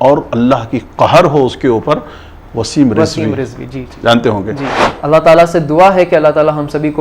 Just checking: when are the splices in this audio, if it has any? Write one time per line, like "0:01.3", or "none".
0:04.8